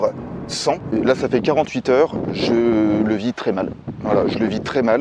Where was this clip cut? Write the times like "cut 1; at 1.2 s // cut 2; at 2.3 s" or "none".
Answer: cut 1; at 0.9 s